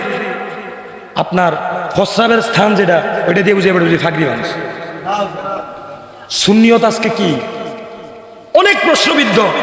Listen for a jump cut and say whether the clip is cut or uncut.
cut